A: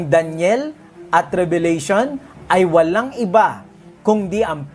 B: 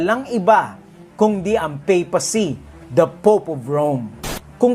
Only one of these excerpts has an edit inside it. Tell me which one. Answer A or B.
B